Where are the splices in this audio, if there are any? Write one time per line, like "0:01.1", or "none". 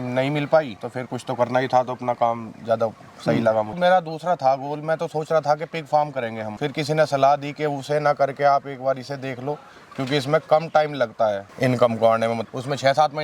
0:03.7